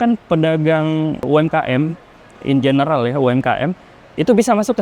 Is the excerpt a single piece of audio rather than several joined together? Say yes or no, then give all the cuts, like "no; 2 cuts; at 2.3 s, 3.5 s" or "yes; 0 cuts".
no; 1 cut; at 1.3 s